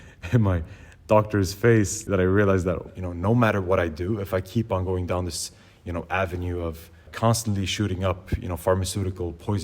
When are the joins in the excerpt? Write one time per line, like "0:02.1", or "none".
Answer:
0:02.0
0:02.9
0:07.1